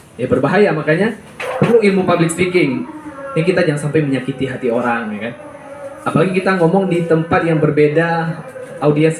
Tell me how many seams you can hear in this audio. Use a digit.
0